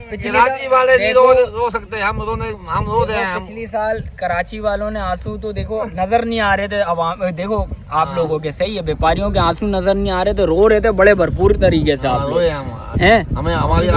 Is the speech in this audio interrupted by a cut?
no; 0 cuts

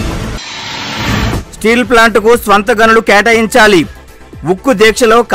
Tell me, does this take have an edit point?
no; 0 cuts

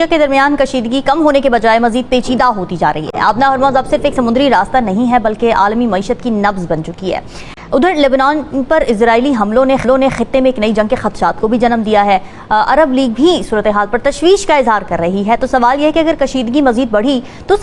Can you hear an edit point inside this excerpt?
no; 0 cuts

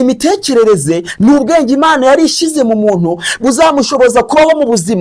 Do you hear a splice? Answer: no; 0 cuts

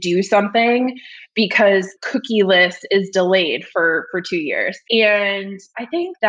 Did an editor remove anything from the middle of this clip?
yes; 1 cut; at 4.8 s

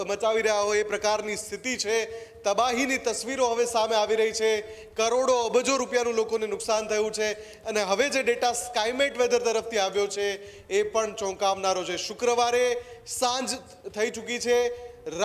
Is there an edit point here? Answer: no; 0 cuts

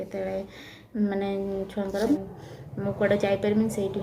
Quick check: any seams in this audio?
yes; 1 cut; at 2.2 s

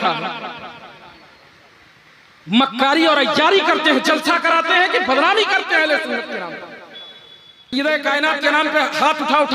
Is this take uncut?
no; 1 cut; at 7.7 s

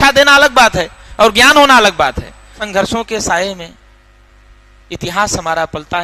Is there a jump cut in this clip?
yes; 1 cut; at 2.6 s

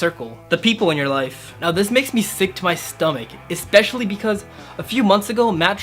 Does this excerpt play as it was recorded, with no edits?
yes; 0 cuts

